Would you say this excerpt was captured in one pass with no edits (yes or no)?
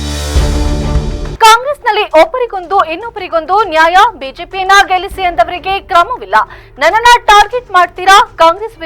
yes